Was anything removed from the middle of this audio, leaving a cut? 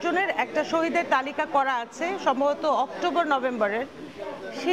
no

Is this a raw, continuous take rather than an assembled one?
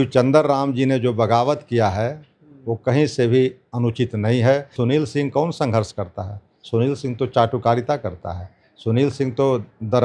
no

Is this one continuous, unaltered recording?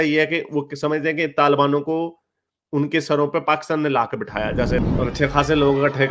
no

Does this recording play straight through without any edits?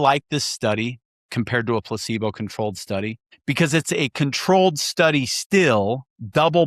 no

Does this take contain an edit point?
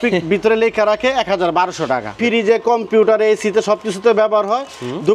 yes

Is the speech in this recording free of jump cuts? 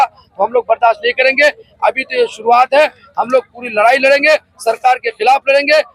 yes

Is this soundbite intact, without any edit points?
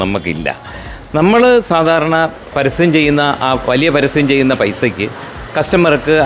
yes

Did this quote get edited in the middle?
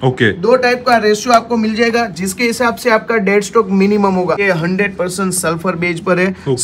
yes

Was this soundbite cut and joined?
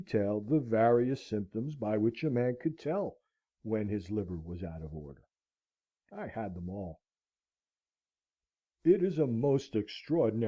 no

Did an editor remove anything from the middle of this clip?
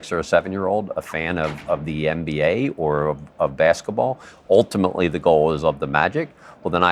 no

